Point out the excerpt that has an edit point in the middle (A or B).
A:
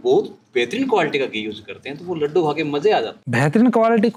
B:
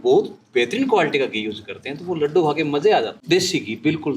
B